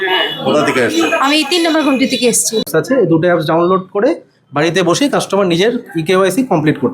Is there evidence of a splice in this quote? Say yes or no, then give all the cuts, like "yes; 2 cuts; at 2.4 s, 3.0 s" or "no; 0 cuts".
yes; 1 cut; at 2.6 s